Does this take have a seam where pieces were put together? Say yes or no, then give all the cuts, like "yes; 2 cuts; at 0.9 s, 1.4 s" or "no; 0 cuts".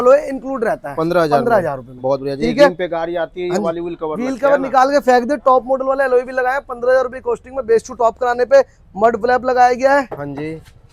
no; 0 cuts